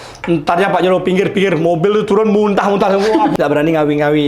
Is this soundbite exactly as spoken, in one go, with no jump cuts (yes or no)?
no